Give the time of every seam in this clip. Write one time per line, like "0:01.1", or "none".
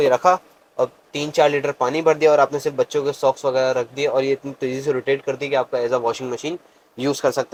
none